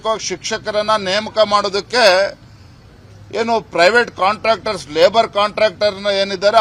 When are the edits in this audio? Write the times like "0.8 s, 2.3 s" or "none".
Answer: 2.7 s